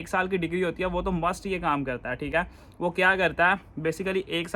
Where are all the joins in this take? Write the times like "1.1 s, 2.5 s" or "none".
none